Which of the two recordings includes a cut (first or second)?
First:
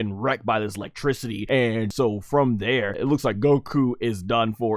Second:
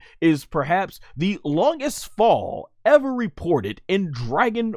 first